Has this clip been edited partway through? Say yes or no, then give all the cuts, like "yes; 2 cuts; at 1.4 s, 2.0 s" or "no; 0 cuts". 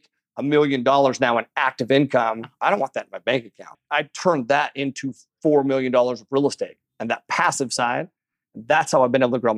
yes; 3 cuts; at 2.5 s, 3.8 s, 6.9 s